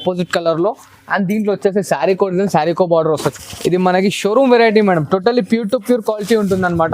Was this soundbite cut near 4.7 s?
no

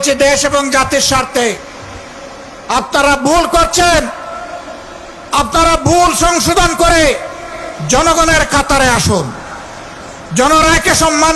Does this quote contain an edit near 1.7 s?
no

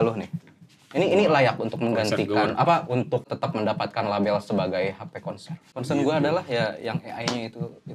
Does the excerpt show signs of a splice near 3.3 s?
yes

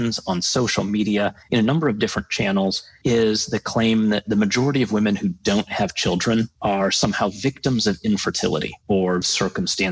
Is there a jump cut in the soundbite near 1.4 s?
yes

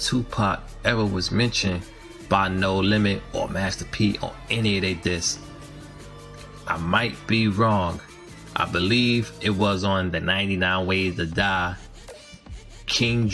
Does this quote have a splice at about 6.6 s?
yes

